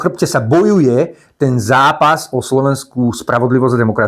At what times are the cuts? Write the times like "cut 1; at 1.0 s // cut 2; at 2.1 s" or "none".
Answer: none